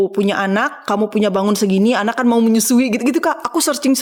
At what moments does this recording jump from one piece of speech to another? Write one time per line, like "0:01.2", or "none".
none